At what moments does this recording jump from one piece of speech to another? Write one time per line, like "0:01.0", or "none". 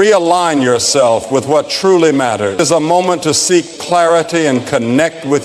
0:02.6